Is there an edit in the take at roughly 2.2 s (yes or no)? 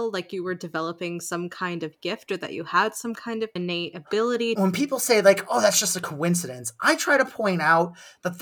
no